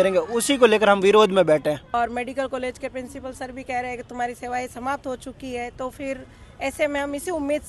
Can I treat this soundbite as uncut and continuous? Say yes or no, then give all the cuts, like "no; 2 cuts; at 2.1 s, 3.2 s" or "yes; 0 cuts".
no; 1 cut; at 1.9 s